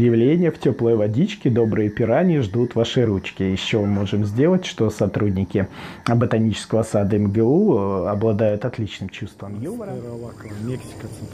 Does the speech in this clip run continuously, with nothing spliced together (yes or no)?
no